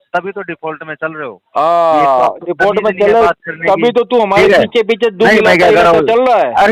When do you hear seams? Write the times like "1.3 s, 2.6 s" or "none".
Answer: none